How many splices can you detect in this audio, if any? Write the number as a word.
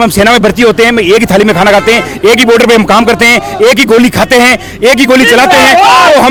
zero